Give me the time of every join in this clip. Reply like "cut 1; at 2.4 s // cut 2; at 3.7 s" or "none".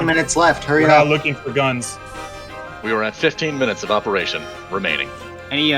cut 1; at 2.7 s